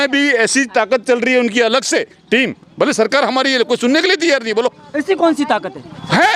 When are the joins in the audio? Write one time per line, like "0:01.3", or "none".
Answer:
none